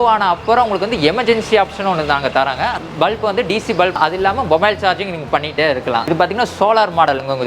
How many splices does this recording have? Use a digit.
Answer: 2